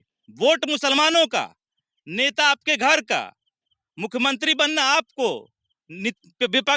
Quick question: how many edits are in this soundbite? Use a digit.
0